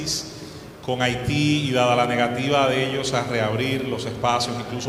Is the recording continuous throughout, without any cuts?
yes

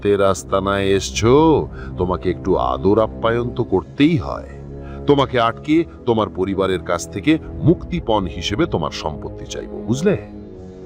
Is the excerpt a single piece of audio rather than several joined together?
yes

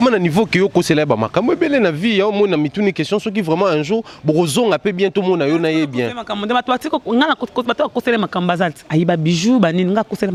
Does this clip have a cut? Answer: no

